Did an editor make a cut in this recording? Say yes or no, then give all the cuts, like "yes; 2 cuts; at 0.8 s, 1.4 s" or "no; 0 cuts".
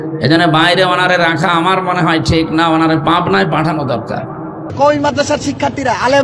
yes; 1 cut; at 4.7 s